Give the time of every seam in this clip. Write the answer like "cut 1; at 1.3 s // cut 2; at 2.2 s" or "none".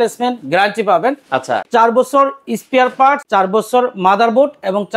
cut 1; at 1.6 s // cut 2; at 3.2 s